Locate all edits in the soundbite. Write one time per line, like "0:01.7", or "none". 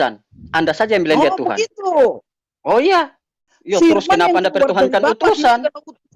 0:03.3